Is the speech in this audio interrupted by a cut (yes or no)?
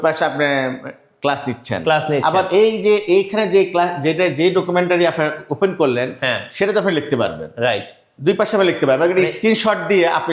no